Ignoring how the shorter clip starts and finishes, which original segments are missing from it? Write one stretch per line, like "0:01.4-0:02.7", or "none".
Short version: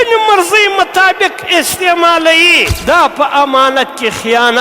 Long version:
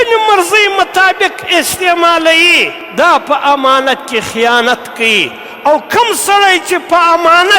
0:02.7-0:02.8